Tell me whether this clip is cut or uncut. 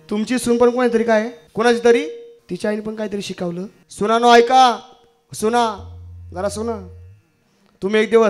cut